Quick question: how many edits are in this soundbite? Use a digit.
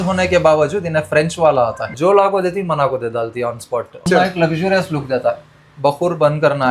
2